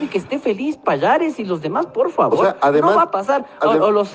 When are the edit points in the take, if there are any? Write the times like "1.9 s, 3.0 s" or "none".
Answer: none